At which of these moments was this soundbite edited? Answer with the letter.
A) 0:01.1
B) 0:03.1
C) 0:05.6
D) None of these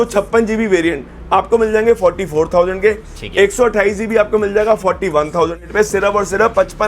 C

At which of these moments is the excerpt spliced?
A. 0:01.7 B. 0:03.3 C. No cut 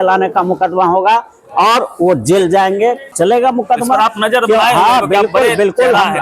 B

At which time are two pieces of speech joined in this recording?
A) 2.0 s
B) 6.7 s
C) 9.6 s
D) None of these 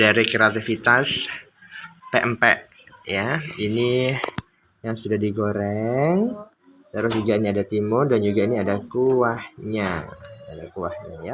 D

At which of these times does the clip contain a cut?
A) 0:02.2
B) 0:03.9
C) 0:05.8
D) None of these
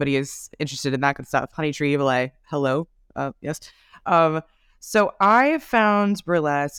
D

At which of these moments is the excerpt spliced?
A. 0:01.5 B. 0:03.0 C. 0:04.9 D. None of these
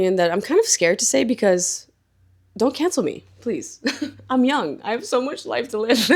D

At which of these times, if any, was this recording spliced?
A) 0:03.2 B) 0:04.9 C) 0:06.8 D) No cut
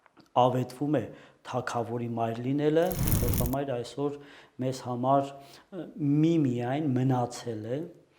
A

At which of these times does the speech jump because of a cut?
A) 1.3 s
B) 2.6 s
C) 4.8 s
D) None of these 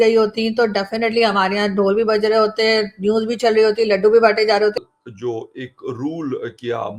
C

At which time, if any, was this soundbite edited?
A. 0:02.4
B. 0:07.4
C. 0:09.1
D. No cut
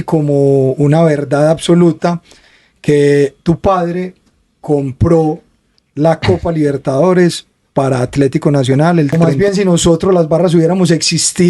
C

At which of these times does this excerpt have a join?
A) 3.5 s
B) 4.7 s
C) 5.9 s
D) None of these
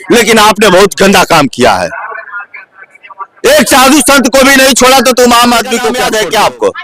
C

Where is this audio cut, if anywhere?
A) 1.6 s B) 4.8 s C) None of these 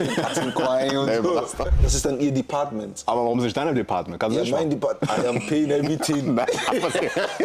A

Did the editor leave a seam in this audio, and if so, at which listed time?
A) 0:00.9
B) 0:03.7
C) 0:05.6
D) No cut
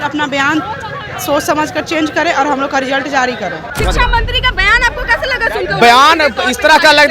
B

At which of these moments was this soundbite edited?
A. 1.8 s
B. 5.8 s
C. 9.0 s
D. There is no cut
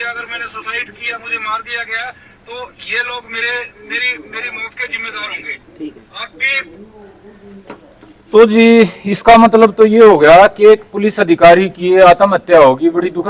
D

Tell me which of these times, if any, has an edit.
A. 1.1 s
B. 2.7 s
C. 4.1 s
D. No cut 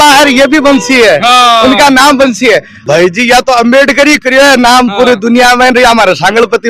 B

